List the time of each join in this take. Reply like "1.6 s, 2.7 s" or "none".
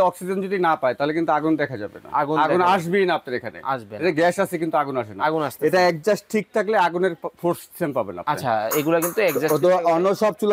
none

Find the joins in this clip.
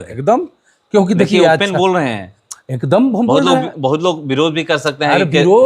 none

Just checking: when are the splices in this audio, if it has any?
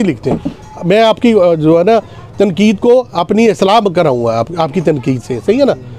none

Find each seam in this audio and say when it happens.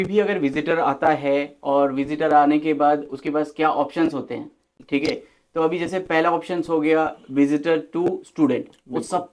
none

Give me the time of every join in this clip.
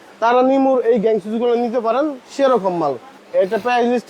3.2 s

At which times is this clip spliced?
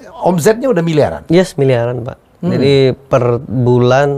none

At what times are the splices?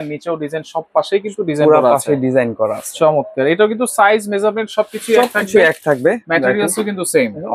none

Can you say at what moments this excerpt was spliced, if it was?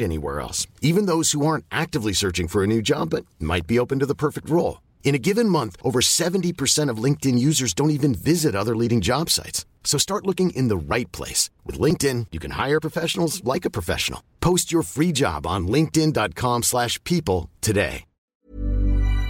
18.3 s

